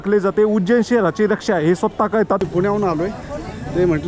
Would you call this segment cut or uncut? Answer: cut